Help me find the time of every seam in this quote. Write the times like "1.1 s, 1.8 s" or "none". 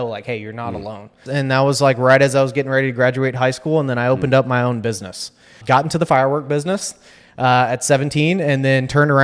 1.2 s, 5.5 s